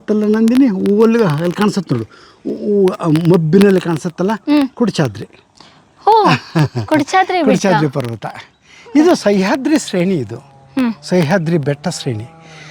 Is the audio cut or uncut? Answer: uncut